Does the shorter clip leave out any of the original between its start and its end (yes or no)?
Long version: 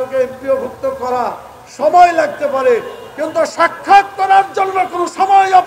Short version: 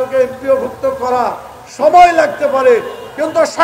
no